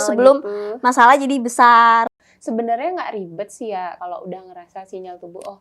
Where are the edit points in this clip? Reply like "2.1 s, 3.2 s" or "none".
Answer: 2.1 s, 4.0 s